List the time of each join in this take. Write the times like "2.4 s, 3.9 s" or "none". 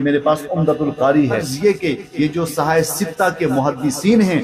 1.5 s